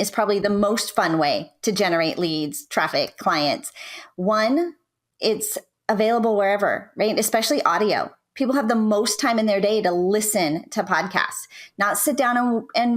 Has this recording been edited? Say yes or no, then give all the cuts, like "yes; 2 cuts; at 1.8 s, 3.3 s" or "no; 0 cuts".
no; 0 cuts